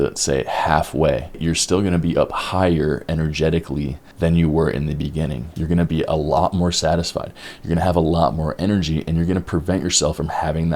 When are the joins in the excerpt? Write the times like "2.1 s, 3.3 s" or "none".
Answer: 1.4 s, 4.0 s, 5.5 s